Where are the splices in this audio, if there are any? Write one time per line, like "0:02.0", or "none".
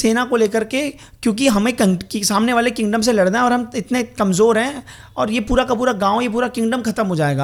none